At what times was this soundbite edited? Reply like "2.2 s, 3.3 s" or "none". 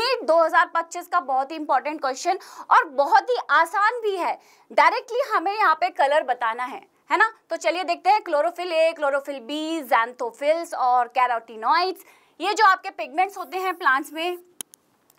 none